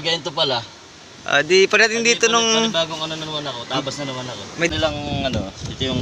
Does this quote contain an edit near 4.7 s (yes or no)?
yes